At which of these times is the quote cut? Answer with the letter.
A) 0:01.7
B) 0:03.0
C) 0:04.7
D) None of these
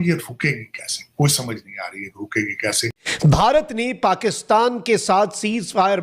B